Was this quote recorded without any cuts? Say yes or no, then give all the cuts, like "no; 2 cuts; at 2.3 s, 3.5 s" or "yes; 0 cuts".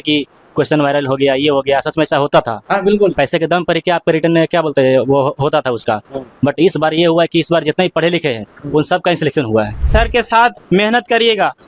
no; 1 cut; at 9.8 s